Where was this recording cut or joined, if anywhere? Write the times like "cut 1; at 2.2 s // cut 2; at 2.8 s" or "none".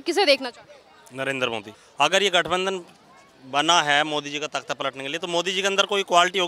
cut 1; at 1.8 s